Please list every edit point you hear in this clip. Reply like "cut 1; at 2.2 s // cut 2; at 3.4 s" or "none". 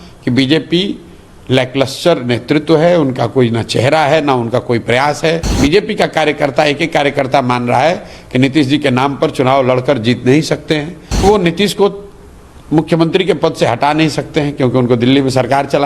cut 1; at 5.5 s // cut 2; at 11.2 s